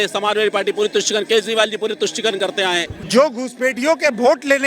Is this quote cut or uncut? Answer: cut